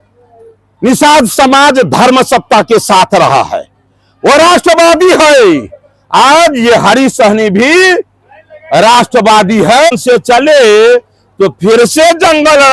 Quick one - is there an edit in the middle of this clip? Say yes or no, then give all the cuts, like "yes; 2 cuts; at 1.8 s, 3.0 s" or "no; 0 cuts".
yes; 1 cut; at 9.9 s